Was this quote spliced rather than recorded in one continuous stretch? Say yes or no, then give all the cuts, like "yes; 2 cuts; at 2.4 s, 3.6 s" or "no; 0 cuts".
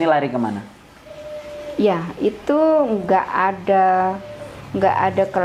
no; 0 cuts